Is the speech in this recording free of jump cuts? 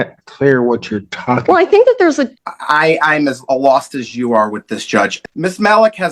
no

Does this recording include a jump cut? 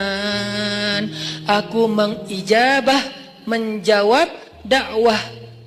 no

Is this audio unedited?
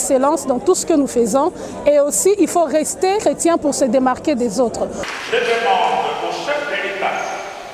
no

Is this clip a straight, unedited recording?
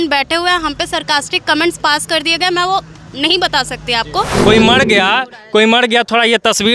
no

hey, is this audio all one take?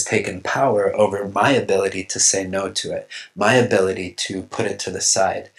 yes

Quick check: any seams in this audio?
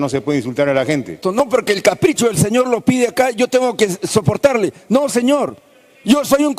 yes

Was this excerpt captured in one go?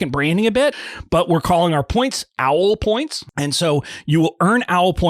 no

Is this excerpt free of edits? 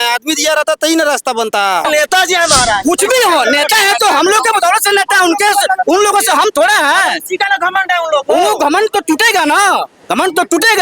no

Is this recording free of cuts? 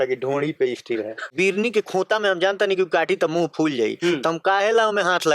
no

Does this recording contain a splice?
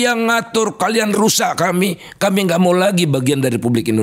no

